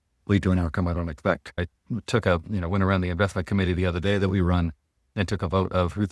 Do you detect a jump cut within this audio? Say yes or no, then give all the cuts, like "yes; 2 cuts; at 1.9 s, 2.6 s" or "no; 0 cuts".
yes; 1 cut; at 1.7 s